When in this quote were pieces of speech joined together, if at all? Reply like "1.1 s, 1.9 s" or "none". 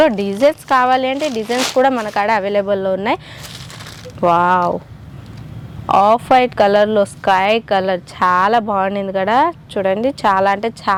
none